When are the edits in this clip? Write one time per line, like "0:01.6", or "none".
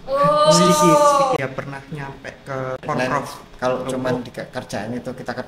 0:03.0